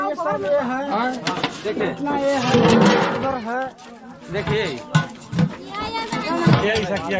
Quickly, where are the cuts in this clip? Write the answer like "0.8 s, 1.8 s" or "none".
none